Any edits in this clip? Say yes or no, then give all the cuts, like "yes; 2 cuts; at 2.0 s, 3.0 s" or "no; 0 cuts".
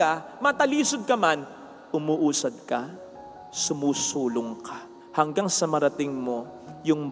no; 0 cuts